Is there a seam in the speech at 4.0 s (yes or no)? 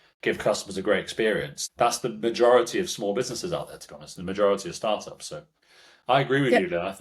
no